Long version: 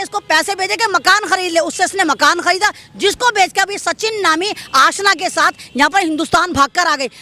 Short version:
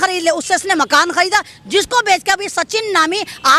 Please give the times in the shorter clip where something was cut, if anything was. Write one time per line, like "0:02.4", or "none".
none